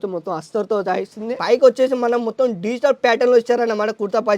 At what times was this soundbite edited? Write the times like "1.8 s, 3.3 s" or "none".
1.4 s